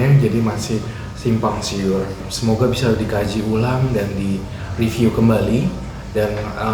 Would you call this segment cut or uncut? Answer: cut